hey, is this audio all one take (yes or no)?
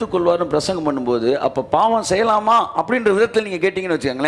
yes